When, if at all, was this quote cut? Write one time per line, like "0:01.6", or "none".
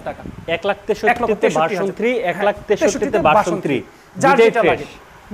none

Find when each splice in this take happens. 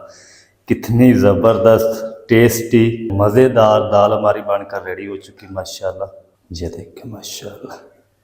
0:03.1
0:06.3

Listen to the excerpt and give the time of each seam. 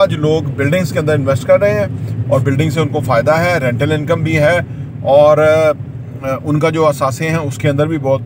none

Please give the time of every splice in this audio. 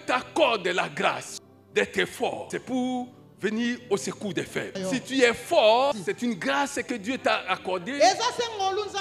0:01.3
0:02.4
0:04.7
0:05.9

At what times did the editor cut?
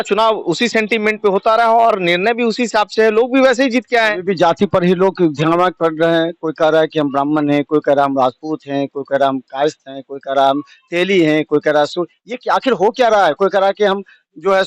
none

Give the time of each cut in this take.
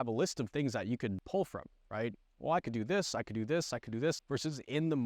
0:01.2
0:04.2

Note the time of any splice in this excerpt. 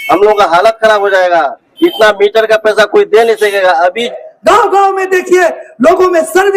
0:04.0

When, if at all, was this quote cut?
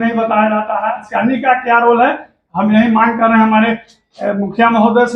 0:01.1

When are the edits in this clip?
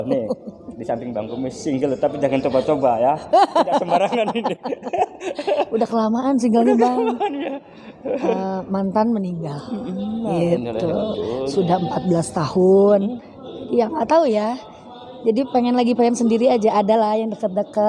none

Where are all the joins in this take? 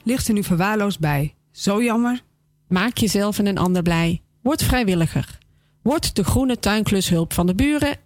none

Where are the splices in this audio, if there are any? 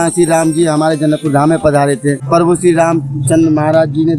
0:02.2

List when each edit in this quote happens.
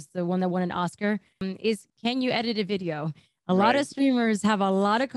0:01.5

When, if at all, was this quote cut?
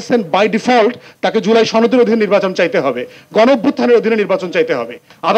none

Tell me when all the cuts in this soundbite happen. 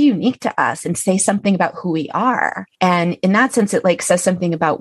0:02.6

